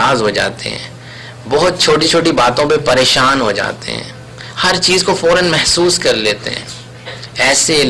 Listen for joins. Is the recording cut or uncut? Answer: uncut